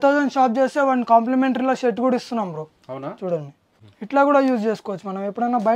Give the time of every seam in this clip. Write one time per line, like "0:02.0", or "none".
0:03.6

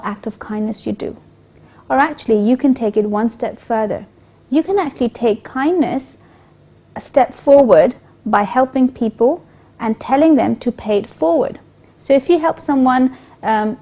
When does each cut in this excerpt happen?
0:06.4

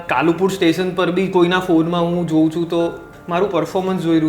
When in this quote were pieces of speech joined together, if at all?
0:03.1

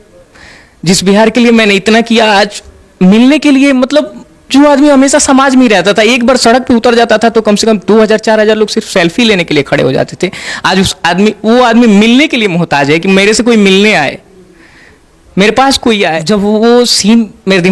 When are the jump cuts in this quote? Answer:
0:16.2

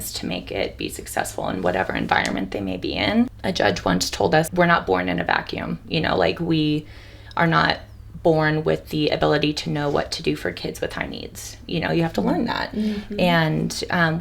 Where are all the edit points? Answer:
0:03.4
0:04.5

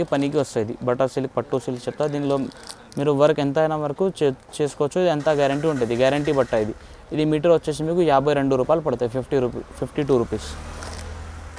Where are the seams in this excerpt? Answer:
none

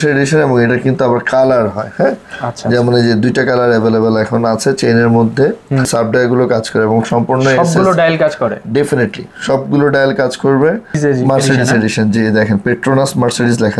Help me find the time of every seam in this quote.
0:05.9
0:11.0

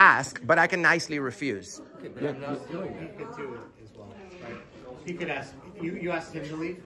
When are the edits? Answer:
none

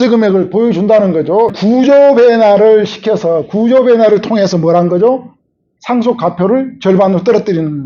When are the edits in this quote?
0:01.6

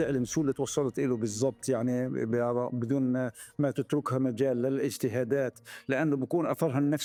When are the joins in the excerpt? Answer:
none

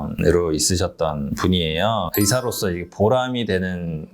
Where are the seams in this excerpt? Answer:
0:02.1

